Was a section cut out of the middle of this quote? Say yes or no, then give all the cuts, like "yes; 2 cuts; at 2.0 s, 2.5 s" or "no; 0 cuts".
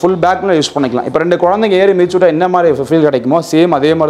no; 0 cuts